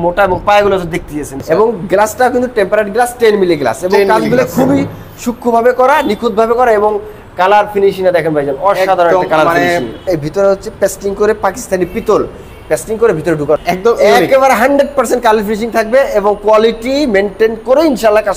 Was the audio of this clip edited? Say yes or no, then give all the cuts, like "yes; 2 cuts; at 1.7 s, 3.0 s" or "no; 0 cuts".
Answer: yes; 3 cuts; at 1.3 s, 10.1 s, 13.6 s